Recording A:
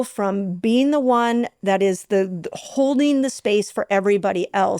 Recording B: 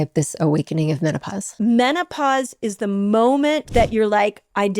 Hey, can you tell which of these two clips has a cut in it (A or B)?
B